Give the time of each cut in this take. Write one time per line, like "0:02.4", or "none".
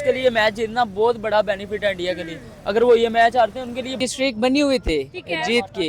0:04.0